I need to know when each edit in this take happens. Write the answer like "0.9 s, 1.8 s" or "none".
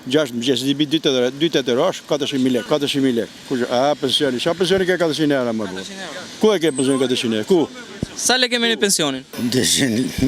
9.3 s